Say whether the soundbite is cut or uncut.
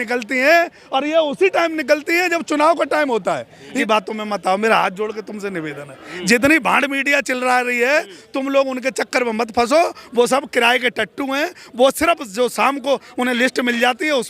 cut